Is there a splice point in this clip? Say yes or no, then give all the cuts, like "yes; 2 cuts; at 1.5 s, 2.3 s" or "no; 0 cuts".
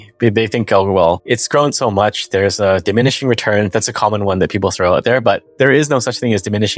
yes; 2 cuts; at 1.2 s, 5.5 s